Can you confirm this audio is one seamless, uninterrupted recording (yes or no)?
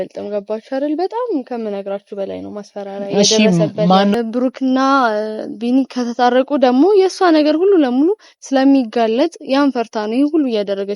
no